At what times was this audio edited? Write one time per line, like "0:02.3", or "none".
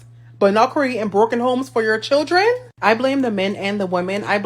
none